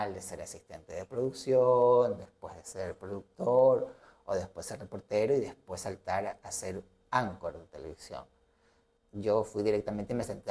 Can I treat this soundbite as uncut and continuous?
yes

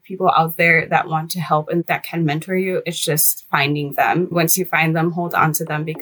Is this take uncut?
no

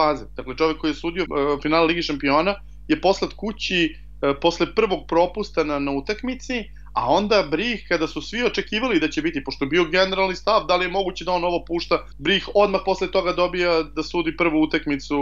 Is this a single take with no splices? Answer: no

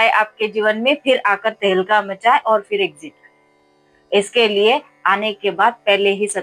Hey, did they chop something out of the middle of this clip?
no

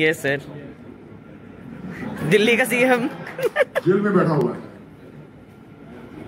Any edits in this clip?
no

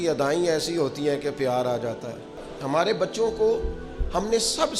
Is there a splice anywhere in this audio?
yes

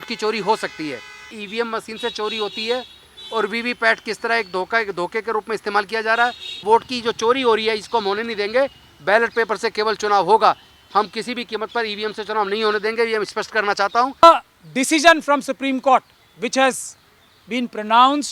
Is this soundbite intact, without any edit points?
no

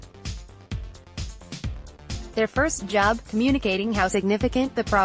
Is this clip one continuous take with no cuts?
no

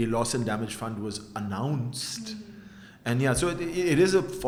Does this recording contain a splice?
no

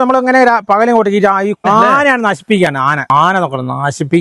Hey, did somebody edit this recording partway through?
yes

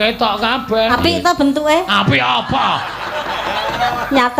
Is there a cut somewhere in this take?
yes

